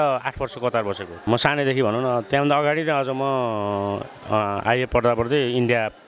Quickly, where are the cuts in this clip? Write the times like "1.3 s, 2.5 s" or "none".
1.2 s